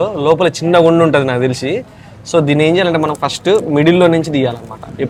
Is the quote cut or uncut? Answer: uncut